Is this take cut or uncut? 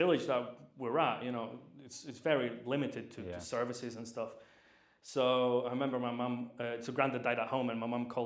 uncut